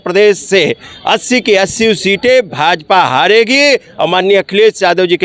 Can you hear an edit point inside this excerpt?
no; 0 cuts

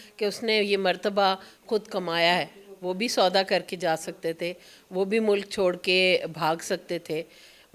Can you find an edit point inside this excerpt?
no; 0 cuts

